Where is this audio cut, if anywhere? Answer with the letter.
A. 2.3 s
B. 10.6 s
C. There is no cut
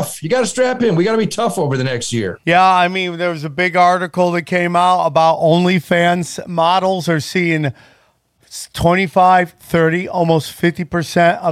A